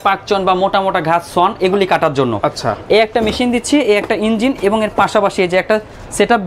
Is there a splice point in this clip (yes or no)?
no